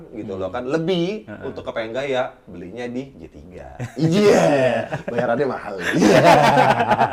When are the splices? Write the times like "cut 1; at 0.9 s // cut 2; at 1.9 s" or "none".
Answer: none